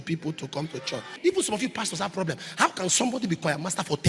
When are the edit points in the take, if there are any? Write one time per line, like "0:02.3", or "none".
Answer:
0:01.1

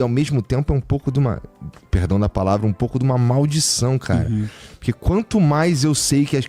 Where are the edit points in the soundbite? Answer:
none

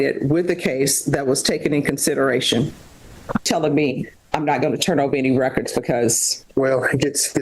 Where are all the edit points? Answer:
0:03.4

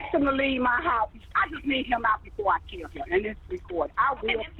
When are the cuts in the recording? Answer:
0:01.2

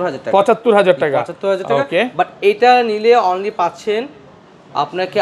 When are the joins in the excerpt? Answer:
none

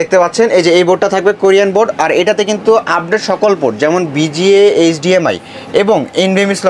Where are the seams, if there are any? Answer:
none

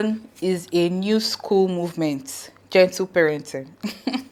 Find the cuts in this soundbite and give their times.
none

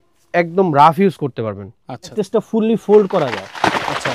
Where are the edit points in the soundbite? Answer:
0:02.1

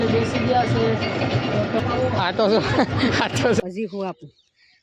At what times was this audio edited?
0:01.8
0:03.6

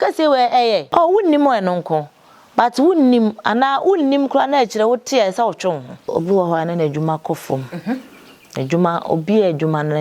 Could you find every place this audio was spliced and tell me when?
0:00.9
0:06.1

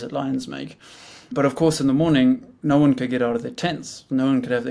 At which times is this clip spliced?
0:01.3
0:02.5

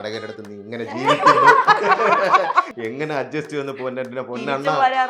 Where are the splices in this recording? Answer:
0:02.7

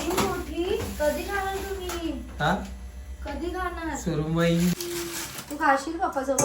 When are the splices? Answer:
0:04.8

